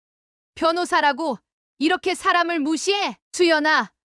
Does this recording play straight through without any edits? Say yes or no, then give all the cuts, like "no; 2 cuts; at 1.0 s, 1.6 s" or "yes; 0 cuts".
no; 1 cut; at 3.2 s